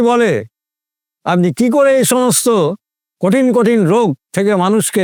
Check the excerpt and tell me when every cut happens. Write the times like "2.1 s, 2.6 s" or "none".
none